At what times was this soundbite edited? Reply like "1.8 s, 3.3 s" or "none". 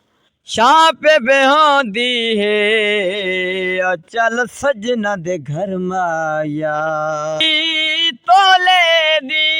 7.4 s